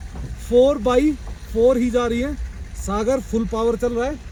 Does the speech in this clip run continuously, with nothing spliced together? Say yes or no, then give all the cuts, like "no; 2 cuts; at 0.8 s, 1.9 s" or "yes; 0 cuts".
yes; 0 cuts